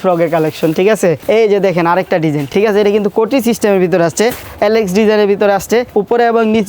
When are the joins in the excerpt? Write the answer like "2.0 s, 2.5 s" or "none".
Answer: 1.2 s, 2.5 s, 4.4 s, 5.9 s